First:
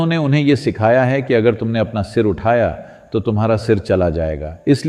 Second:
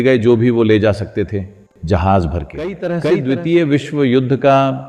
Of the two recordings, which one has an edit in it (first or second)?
second